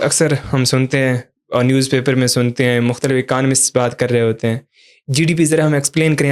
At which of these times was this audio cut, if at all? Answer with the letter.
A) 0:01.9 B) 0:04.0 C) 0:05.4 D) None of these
D